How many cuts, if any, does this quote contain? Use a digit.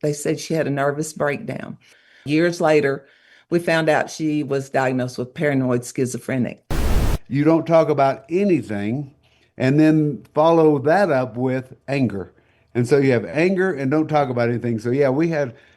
2